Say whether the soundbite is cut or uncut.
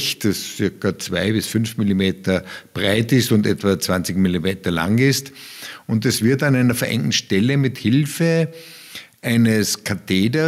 uncut